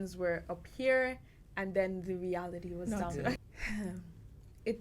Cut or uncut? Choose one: cut